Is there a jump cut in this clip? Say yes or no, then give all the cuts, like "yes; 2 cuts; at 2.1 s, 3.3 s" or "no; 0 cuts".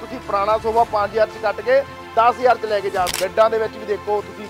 yes; 1 cut; at 3.1 s